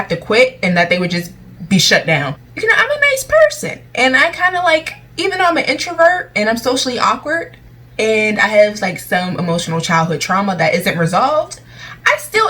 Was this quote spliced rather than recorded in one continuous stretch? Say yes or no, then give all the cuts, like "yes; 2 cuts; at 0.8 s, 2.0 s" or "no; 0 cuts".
yes; 1 cut; at 2.4 s